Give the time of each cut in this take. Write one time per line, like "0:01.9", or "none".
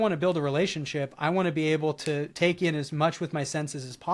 0:02.3